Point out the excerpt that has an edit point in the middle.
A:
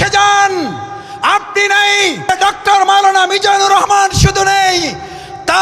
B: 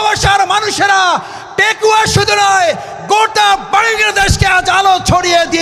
A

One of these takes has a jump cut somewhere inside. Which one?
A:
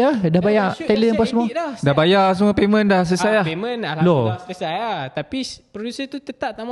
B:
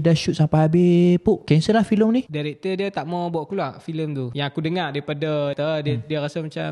B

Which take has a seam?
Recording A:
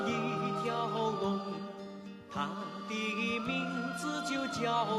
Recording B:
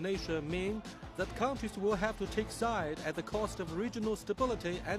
B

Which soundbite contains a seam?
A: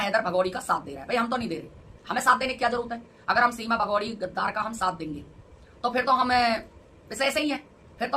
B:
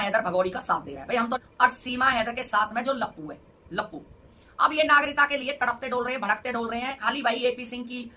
B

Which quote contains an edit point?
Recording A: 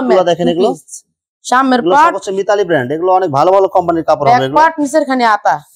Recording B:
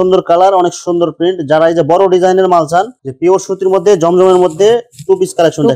B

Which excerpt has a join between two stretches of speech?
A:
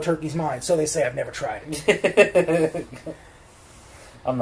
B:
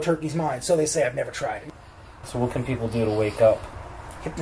B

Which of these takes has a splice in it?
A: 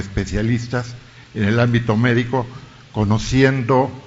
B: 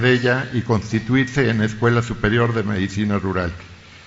A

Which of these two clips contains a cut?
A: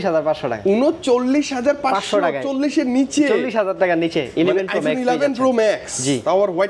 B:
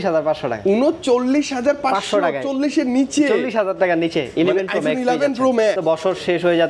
B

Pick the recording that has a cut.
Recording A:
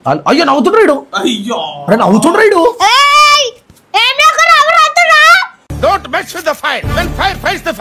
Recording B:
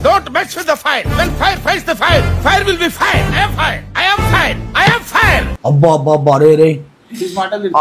B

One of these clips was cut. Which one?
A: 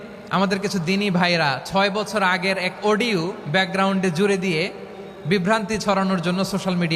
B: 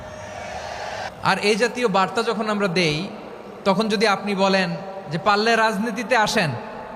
B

